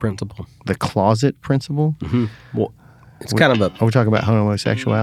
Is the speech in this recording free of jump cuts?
yes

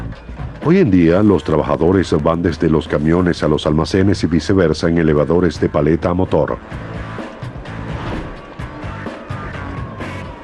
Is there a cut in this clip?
yes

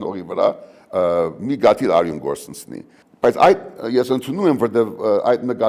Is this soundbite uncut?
yes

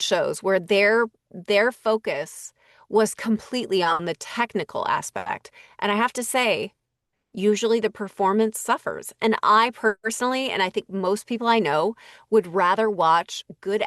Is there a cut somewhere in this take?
no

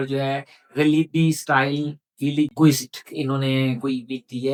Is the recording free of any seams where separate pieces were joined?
yes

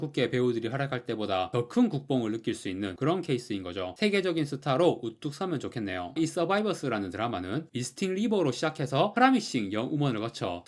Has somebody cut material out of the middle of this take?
yes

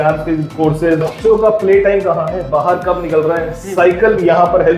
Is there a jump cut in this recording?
yes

